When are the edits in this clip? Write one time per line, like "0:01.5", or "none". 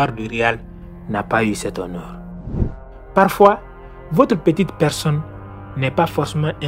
0:02.5